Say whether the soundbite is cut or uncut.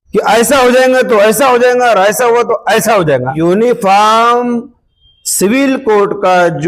cut